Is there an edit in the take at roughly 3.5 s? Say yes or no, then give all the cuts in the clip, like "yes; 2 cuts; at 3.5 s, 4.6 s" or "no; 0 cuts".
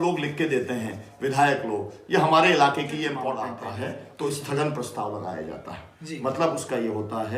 yes; 1 cut; at 3.5 s